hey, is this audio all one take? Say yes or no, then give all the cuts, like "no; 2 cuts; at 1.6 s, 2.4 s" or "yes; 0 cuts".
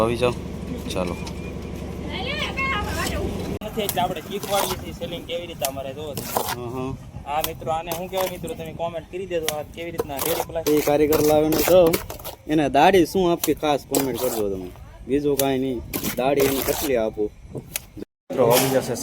no; 3 cuts; at 3.7 s, 10.6 s, 17.9 s